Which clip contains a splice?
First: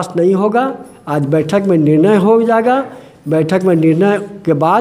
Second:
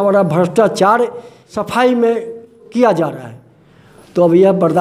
second; 2 cuts; at 1.6 s, 2.6 s

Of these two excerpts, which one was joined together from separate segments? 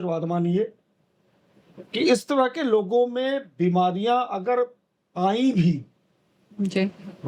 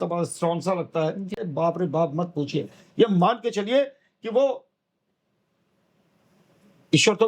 second; 1 cut; at 1.4 s

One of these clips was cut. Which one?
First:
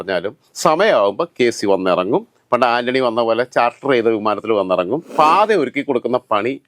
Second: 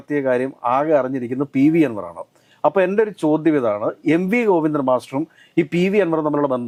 first; 1 cut; at 5.1 s

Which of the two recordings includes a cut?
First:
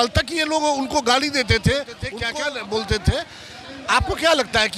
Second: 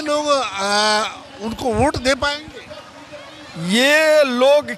first; 1 cut; at 2.1 s

